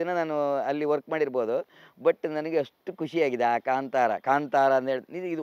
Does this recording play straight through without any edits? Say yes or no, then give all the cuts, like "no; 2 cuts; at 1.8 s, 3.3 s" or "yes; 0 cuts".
yes; 0 cuts